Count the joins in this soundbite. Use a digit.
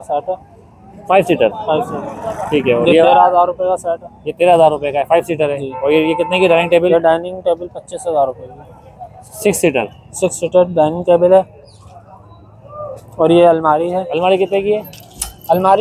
0